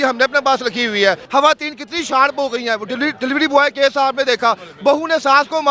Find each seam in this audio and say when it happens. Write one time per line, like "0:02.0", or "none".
0:01.2